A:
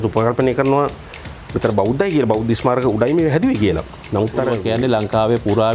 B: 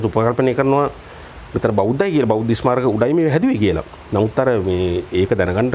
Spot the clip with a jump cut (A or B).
A